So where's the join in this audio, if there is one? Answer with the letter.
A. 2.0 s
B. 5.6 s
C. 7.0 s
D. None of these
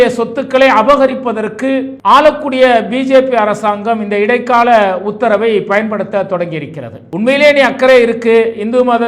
C